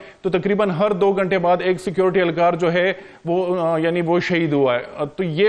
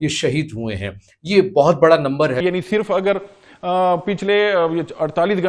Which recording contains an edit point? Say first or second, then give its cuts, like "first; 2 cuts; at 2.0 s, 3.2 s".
second; 1 cut; at 2.4 s